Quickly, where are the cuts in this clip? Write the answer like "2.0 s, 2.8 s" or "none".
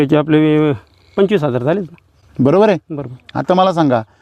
none